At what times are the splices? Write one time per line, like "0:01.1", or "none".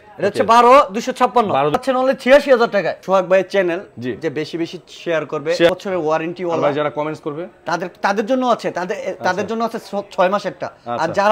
0:01.7
0:03.0
0:05.7